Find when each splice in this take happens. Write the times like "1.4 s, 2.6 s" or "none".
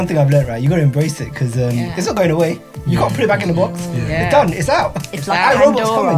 none